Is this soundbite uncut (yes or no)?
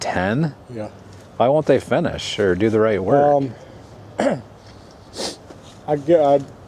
yes